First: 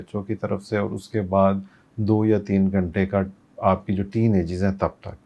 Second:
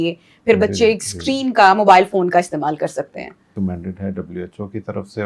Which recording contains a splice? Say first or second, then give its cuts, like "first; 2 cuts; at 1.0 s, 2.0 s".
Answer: second; 1 cut; at 3.5 s